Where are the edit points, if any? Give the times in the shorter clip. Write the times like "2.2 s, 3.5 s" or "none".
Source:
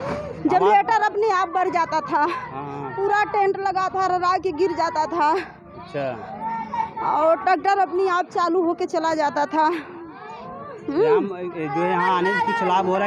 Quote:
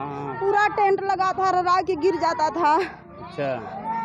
none